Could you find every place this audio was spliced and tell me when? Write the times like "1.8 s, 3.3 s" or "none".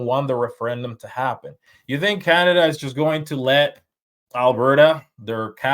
1.7 s